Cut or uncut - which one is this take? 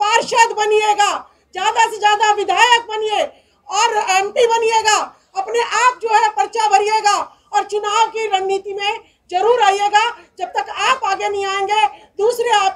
uncut